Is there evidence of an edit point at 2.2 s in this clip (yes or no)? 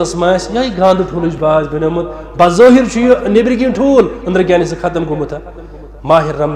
no